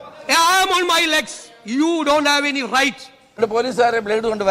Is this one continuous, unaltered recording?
no; 1 cut; at 3.2 s

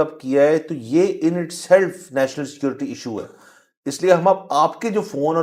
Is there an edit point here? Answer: no; 0 cuts

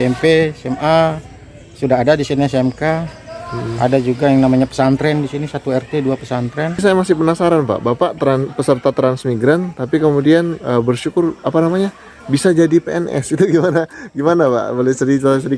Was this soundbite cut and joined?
yes; 1 cut; at 6.8 s

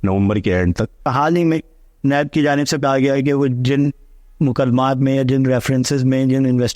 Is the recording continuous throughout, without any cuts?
no; 1 cut; at 1.1 s

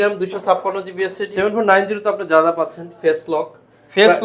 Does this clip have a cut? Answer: yes; 1 cut; at 1.2 s

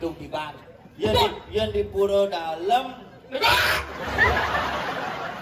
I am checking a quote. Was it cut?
no; 0 cuts

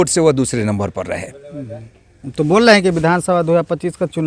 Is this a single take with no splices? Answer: yes; 0 cuts

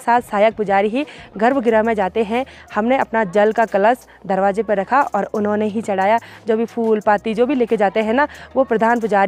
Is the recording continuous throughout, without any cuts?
yes; 0 cuts

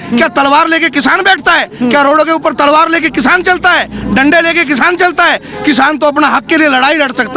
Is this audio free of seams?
yes; 0 cuts

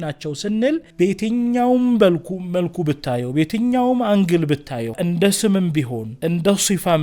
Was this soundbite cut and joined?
yes; 3 cuts; at 0.9 s, 5.0 s, 6.0 s

